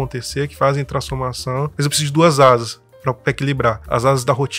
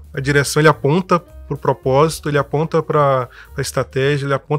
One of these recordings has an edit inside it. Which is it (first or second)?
first